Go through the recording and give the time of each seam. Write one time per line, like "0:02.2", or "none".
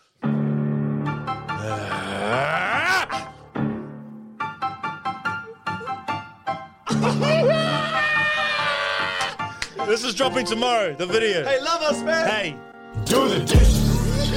none